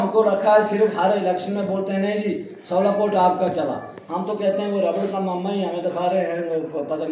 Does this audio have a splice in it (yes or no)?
no